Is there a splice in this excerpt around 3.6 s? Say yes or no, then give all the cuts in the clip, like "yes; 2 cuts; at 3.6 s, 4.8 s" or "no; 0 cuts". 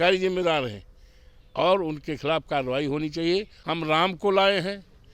yes; 1 cut; at 3.6 s